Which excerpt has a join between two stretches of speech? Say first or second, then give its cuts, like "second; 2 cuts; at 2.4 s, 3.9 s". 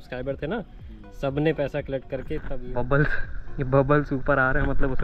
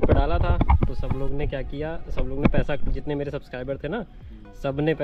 first; 1 cut; at 2.6 s